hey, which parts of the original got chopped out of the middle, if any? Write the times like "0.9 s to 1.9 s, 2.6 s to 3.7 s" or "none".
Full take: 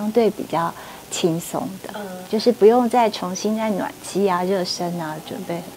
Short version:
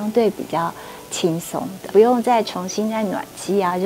1.9 s to 2.6 s